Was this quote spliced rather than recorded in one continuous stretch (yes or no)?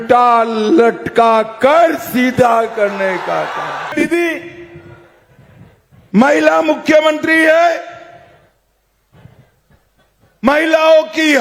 yes